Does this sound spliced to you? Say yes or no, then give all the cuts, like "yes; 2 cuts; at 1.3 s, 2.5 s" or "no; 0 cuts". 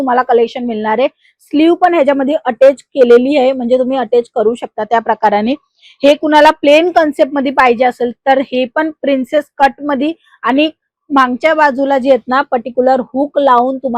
no; 0 cuts